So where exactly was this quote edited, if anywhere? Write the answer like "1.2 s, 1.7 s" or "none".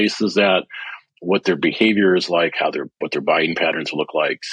none